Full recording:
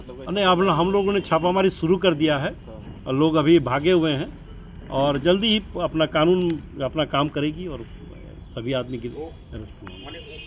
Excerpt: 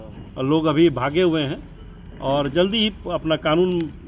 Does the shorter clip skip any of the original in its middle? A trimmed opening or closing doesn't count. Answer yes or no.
no